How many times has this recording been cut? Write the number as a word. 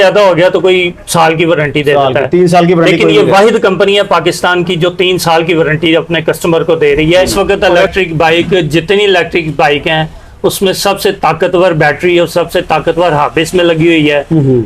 one